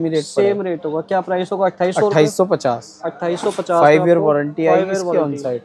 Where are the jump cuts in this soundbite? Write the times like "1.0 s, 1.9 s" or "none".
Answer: none